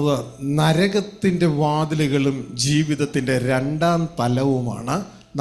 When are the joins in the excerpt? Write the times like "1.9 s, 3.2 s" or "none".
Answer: none